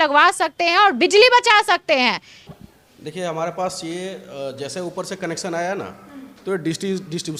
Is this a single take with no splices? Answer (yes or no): yes